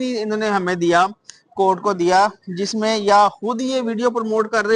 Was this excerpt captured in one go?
yes; 0 cuts

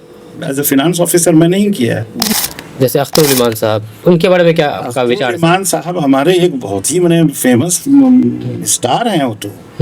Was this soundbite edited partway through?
yes; 1 cut; at 2.2 s

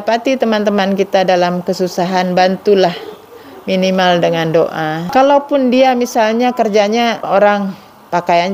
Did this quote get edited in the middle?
yes; 2 cuts; at 5.0 s, 7.2 s

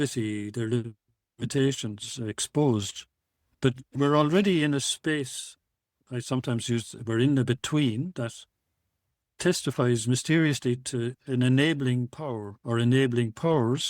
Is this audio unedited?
no; 1 cut; at 3.5 s

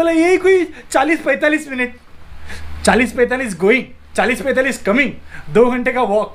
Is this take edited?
no; 0 cuts

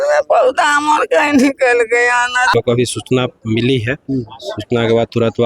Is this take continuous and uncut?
no; 1 cut; at 2.5 s

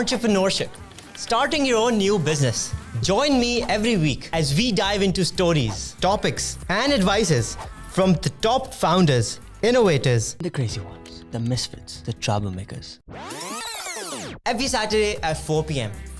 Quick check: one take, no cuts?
yes; 0 cuts

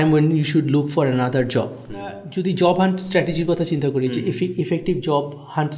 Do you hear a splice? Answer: yes; 1 cut; at 2.3 s

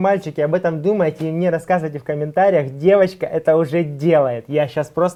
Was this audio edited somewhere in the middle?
no; 0 cuts

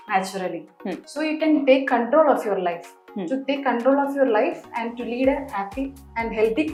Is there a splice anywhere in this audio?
no; 0 cuts

